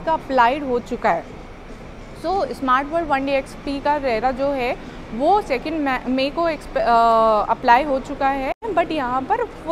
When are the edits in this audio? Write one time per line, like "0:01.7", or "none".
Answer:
0:08.6